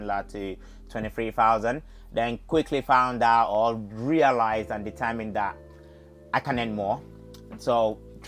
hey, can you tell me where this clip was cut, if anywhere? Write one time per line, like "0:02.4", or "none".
none

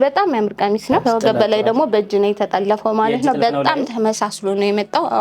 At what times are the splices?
0:01.0

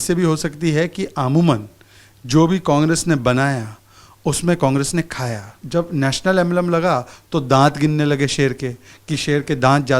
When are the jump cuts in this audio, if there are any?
0:05.6

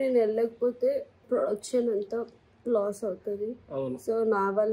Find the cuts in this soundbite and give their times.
0:01.1

